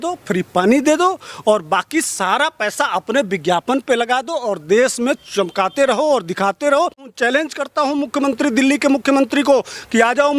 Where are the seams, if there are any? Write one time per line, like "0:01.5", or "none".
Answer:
0:07.1